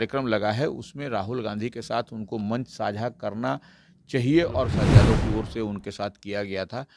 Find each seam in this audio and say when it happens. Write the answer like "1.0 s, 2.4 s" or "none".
4.8 s